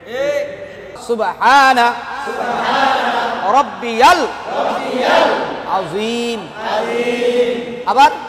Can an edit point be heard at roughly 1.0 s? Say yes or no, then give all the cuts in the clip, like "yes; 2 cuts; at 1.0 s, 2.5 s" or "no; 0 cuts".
yes; 1 cut; at 1.0 s